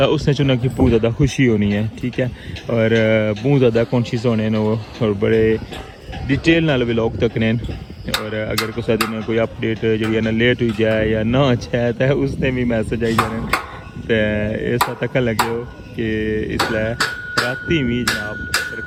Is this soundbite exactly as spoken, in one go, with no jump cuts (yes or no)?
yes